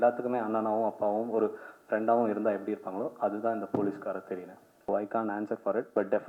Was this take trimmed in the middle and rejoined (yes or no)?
yes